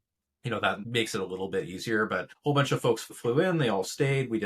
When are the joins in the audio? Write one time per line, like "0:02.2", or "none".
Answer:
0:00.8
0:02.3
0:03.1